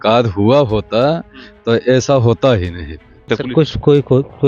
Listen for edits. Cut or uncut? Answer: cut